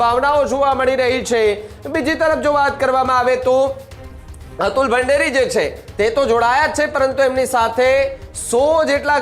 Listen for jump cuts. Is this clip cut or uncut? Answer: uncut